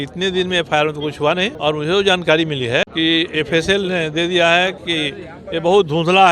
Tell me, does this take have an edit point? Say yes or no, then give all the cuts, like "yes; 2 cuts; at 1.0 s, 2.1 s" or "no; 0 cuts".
yes; 2 cuts; at 1.5 s, 2.9 s